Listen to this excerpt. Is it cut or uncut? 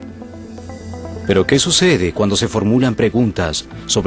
cut